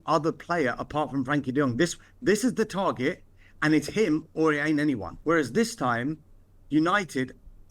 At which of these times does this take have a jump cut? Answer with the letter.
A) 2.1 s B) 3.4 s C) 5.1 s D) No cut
C